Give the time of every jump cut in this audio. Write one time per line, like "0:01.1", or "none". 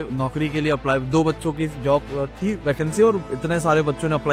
none